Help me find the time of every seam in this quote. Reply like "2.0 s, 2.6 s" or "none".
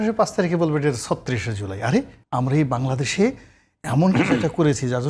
2.2 s